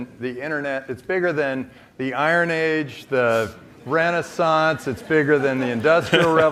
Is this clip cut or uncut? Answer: uncut